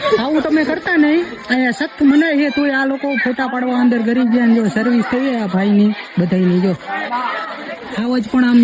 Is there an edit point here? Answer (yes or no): no